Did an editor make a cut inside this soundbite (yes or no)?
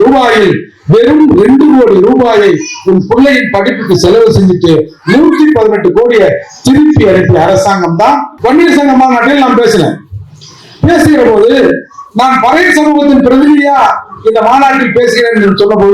yes